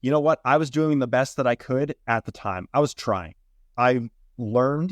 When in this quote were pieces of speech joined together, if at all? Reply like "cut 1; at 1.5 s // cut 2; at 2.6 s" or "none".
cut 1; at 3.6 s